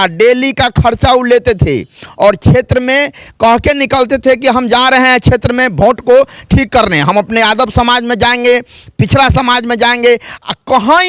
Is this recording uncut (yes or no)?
yes